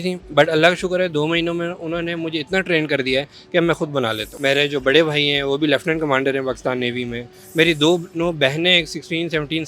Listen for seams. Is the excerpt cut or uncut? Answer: cut